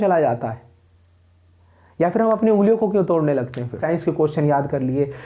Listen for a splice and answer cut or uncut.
cut